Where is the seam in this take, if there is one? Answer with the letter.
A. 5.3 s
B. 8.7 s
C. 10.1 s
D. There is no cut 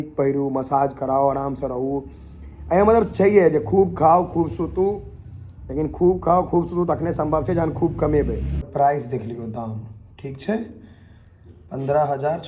B